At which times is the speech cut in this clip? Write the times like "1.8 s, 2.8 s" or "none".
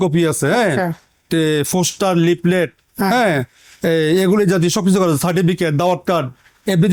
none